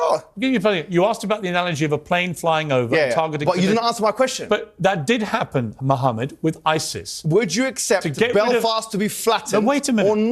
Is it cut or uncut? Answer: uncut